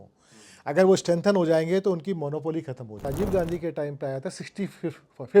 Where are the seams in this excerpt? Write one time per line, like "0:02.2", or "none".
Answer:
0:03.1